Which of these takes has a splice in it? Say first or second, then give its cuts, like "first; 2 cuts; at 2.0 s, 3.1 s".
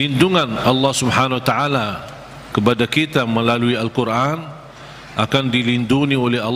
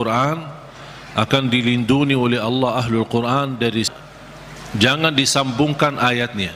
second; 1 cut; at 3.9 s